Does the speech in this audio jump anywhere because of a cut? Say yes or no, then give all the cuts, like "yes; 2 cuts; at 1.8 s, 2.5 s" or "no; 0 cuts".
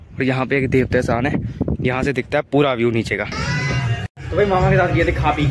yes; 1 cut; at 3.3 s